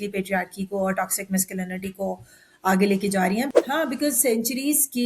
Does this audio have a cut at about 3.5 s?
yes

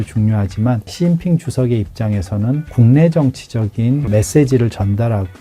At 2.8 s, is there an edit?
yes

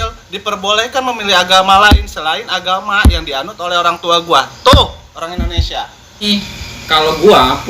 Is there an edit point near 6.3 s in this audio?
yes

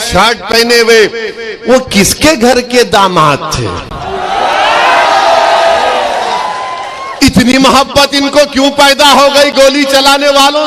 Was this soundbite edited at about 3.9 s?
no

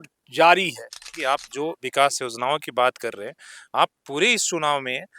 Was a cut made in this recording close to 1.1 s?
yes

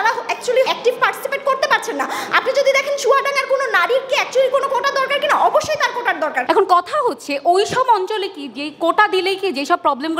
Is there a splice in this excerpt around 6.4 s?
yes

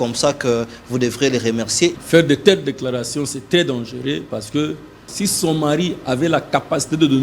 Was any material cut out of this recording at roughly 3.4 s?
no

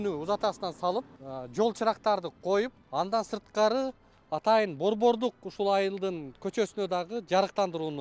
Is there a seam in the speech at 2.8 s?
yes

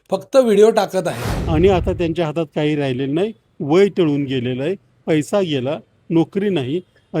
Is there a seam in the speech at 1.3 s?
yes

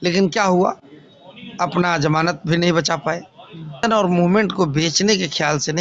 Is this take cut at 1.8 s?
no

